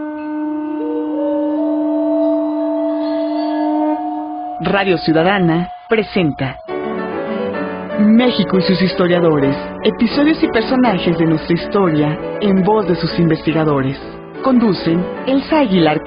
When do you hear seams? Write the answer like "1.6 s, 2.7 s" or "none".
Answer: none